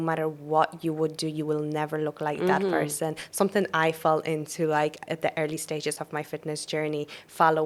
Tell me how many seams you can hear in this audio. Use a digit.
0